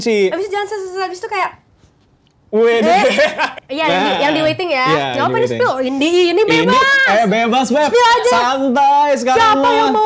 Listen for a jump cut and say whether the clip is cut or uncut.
cut